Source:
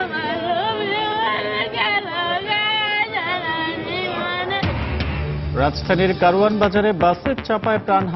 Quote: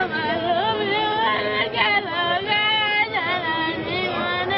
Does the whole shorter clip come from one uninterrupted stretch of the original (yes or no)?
yes